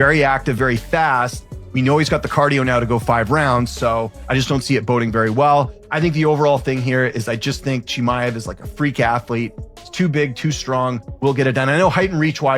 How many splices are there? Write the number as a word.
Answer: one